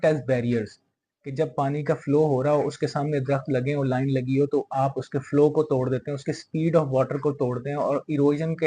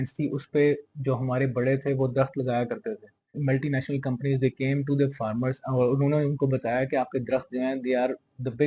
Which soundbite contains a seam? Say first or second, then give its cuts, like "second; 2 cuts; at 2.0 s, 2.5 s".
second; 1 cut; at 3.4 s